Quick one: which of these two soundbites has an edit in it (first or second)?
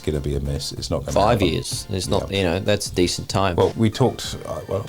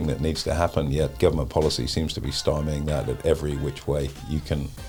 first